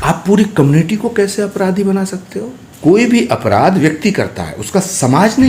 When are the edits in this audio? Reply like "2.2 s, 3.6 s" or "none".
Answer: 2.6 s